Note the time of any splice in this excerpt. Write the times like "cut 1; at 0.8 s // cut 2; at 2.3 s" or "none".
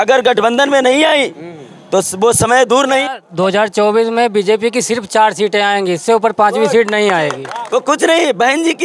cut 1; at 3.2 s // cut 2; at 7.5 s